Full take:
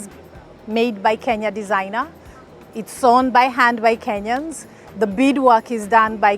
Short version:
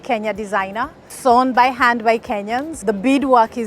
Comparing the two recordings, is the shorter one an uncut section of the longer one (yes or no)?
no